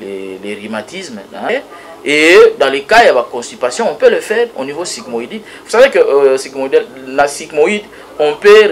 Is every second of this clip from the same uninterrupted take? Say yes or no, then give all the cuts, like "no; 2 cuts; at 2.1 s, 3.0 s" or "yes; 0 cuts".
no; 1 cut; at 1.5 s